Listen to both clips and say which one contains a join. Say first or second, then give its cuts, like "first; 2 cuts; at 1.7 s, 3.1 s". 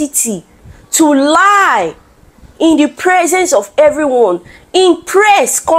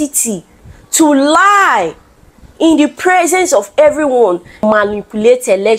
second; 1 cut; at 4.6 s